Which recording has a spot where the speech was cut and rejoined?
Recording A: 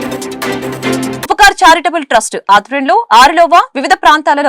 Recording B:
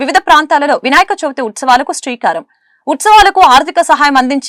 A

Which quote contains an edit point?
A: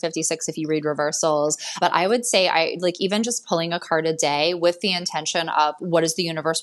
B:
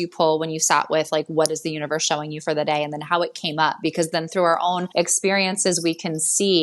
B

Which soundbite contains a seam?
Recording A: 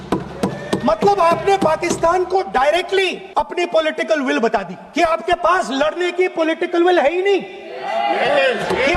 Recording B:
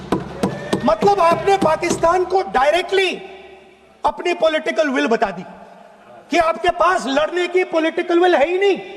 A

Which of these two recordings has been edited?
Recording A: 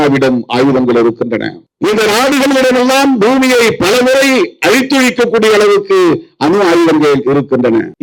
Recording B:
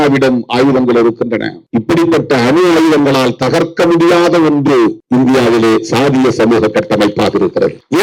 B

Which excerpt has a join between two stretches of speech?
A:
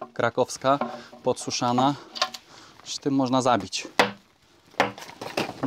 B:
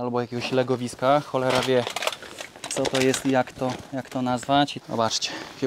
B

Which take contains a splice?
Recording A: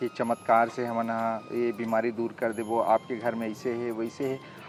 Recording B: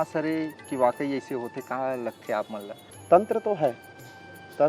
B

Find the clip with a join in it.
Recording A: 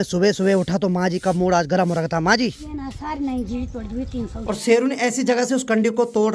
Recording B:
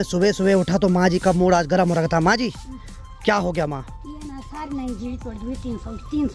A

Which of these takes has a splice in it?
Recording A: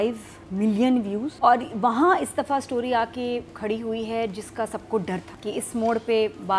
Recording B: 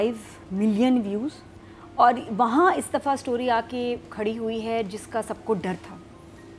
A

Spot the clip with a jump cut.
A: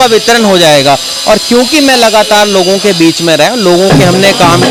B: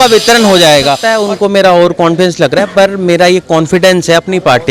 B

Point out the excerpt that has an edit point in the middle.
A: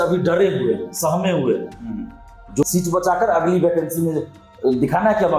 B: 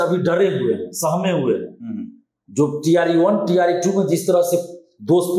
A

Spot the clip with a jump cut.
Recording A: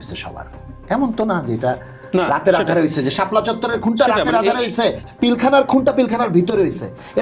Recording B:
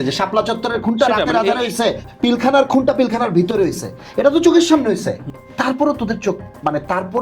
B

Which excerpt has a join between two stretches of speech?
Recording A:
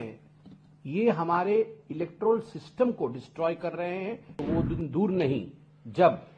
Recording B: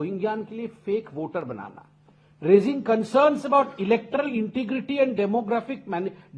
A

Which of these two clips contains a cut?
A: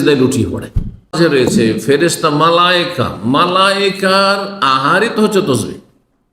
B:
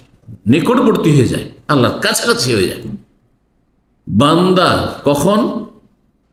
A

